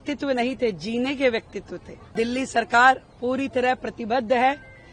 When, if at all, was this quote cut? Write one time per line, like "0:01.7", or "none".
0:02.1